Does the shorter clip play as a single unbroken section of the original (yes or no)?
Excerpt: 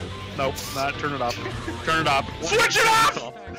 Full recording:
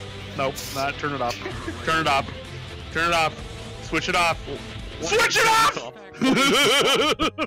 no